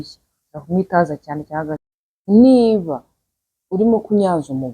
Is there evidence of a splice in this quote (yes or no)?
no